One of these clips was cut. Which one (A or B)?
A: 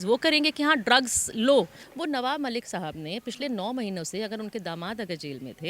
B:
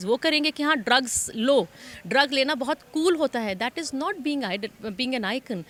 A